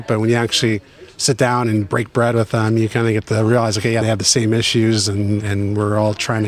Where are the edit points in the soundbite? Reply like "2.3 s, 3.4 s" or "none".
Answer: 4.0 s